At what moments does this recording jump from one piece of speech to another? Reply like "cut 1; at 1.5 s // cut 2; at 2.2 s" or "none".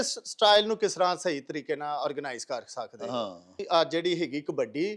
cut 1; at 3.6 s